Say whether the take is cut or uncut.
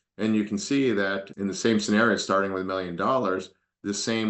uncut